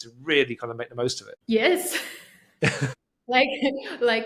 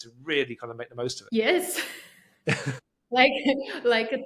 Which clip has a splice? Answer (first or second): second